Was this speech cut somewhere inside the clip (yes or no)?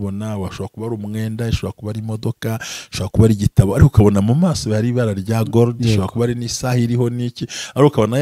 no